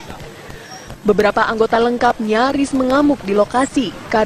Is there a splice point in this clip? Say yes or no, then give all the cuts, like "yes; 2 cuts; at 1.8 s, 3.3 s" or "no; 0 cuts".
no; 0 cuts